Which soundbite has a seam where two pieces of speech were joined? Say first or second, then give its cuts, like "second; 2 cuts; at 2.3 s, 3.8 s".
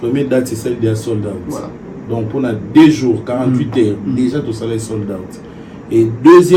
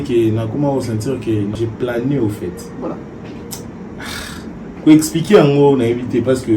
second; 1 cut; at 1.5 s